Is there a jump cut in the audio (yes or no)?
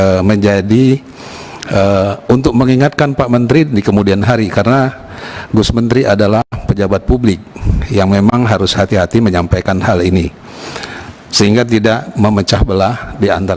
no